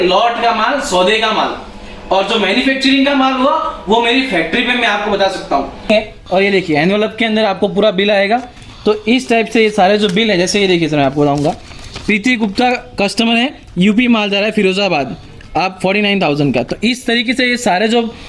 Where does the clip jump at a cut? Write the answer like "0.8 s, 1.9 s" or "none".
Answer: 5.9 s